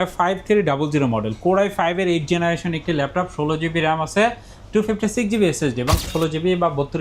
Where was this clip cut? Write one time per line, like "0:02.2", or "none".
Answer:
0:06.1